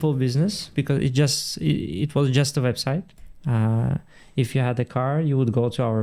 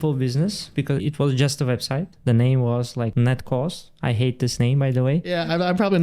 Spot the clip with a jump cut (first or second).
second